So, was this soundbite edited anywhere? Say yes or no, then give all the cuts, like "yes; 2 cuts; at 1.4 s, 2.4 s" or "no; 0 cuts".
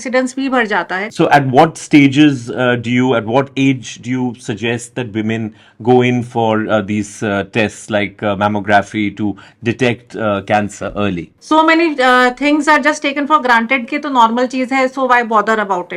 yes; 2 cuts; at 1.1 s, 11.3 s